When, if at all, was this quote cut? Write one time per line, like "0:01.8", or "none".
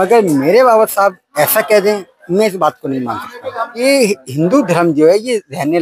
0:03.8